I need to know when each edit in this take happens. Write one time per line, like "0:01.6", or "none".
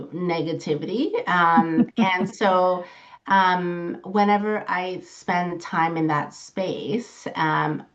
none